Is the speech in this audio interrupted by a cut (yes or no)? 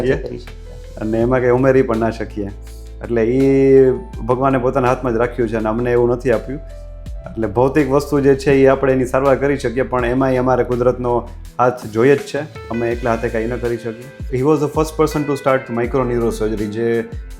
yes